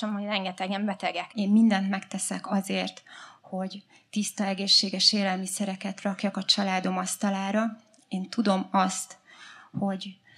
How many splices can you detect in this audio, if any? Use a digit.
1